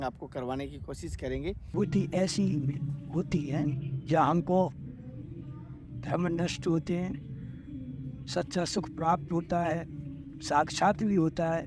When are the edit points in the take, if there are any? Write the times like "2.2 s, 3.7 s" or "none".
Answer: 1.7 s